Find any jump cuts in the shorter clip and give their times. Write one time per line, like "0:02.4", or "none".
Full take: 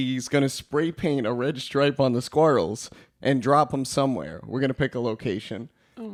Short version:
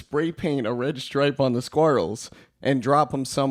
none